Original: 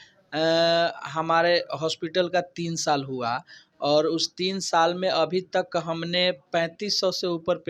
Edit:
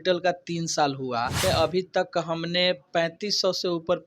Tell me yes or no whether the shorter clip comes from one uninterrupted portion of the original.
no